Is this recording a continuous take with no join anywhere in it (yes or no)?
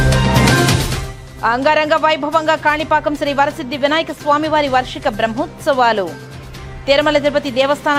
yes